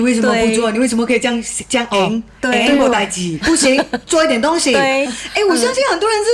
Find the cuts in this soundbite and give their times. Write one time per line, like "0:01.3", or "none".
none